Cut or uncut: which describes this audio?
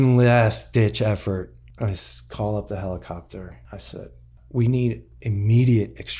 cut